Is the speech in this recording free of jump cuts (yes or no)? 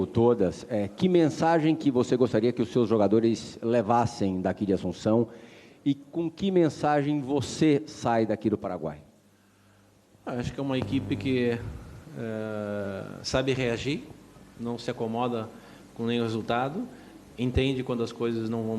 no